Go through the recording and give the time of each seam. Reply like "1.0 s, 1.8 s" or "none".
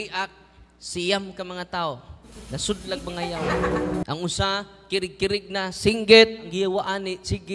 6.5 s